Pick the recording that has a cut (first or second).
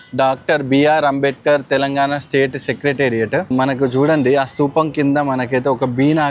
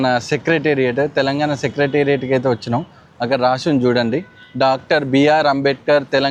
first